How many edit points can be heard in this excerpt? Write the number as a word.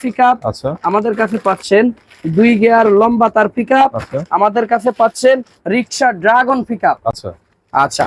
zero